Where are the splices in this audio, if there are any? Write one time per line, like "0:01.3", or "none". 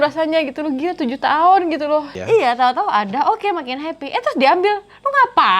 0:02.2